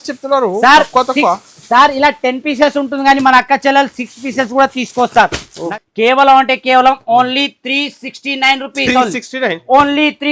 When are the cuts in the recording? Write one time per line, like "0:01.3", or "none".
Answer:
0:05.6